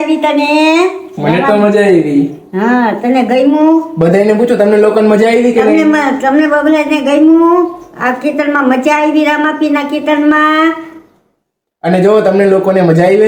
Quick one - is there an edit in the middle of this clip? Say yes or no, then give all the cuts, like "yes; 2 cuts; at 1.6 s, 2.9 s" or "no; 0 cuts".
no; 0 cuts